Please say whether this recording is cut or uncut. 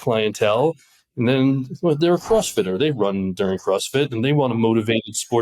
uncut